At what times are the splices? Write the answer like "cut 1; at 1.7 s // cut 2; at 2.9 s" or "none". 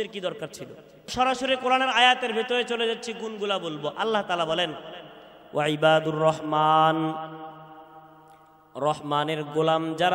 cut 1; at 1.1 s